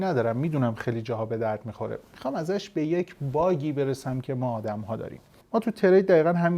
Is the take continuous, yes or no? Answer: no